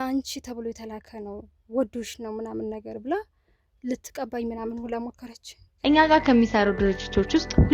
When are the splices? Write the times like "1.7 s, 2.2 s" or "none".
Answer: 5.7 s

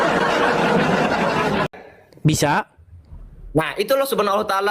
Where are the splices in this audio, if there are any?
1.7 s

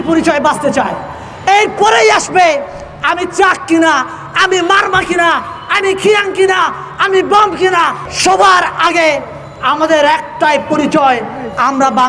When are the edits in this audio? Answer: 8.1 s

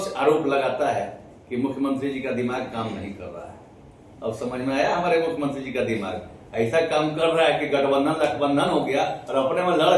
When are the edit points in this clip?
none

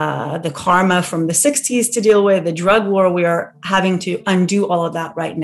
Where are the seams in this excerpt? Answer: none

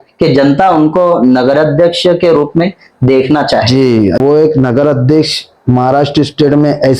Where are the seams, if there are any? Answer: 4.2 s

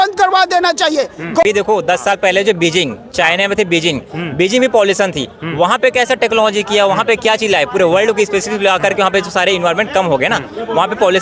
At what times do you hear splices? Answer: 1.4 s

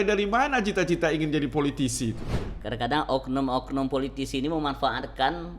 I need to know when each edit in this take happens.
2.3 s

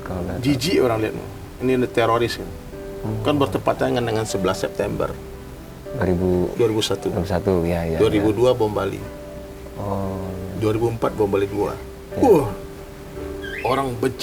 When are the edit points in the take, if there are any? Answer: none

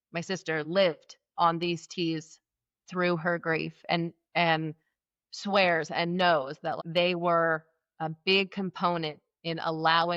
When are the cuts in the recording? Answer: none

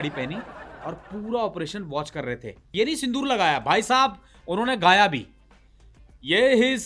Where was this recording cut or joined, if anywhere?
2.7 s

